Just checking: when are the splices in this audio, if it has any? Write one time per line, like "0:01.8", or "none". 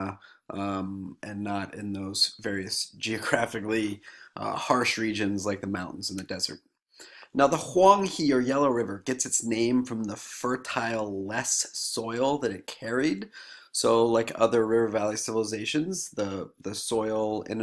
0:12.8

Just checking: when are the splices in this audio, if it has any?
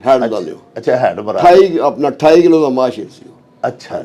none

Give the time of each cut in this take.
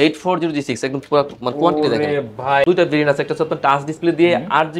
0:02.7

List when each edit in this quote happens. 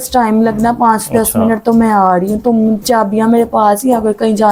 none

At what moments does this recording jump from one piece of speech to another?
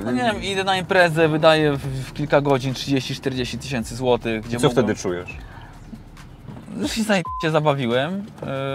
none

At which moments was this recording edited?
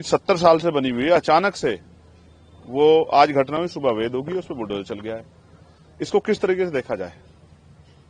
none

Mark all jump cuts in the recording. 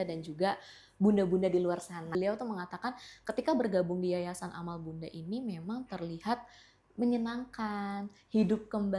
0:02.1

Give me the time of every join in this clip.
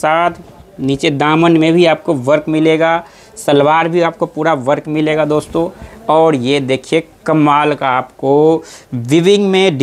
none

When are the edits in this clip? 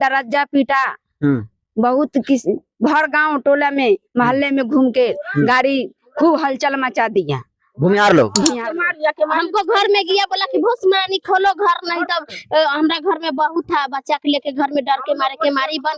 0:08.6

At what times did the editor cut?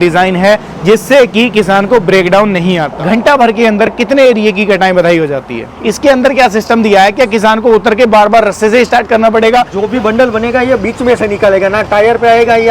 0:02.9
0:05.7
0:09.8

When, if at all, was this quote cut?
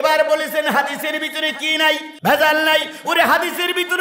0:02.1

